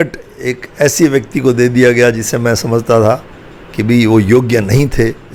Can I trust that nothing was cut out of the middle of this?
yes; 0 cuts

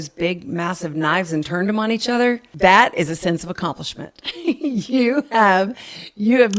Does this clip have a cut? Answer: yes; 1 cut; at 2.5 s

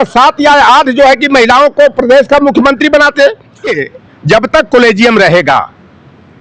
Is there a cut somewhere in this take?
yes; 1 cut; at 3.7 s

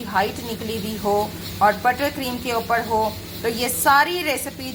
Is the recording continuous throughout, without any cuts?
yes; 0 cuts

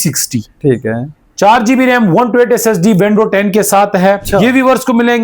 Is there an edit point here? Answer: yes; 1 cut; at 4.2 s

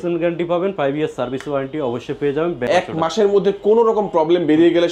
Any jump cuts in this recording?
yes; 1 cut; at 2.7 s

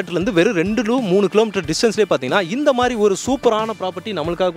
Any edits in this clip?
no; 0 cuts

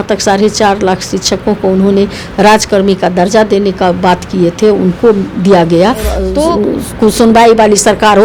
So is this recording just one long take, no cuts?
no; 1 cut; at 6.4 s

